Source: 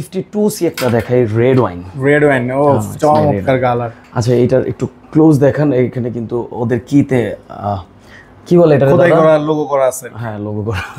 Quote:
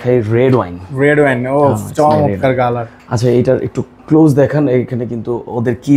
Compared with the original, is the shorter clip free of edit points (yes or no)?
yes